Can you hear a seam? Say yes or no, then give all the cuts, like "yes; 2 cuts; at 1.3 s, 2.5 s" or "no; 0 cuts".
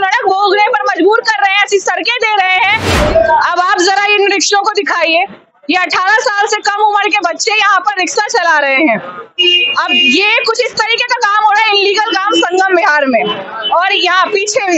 yes; 1 cut; at 2.9 s